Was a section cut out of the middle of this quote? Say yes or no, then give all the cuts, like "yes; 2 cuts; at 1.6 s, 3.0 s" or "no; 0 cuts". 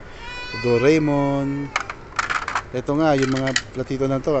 no; 0 cuts